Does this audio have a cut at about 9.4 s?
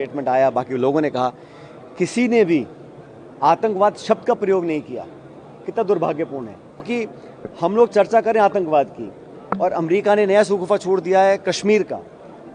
no; 1 cut; at 6.9 s

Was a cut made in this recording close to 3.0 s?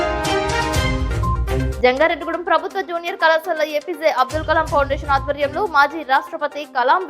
no; 1 cut; at 1.7 s

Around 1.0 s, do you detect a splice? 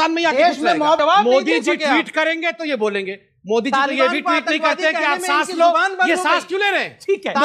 yes; 1 cut; at 1.0 s

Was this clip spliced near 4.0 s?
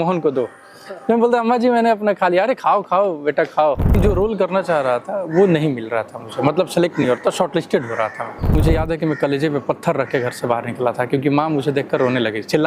yes; 2 cuts; at 4.0 s, 8.6 s

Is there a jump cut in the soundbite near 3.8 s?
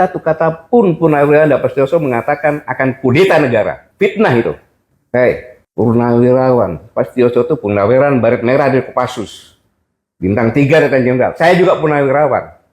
no; 1 cut; at 5.6 s

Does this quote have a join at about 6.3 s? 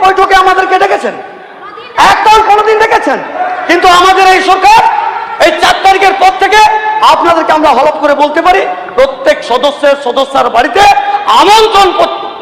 no; 0 cuts

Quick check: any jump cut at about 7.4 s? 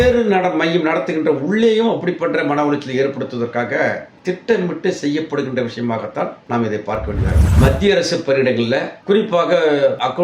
yes; 1 cut; at 7.4 s

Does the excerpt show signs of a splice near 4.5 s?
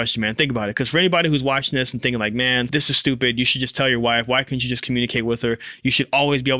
no; 1 cut; at 2.7 s

